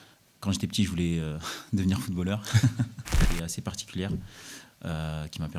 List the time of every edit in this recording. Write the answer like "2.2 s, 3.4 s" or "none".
3.2 s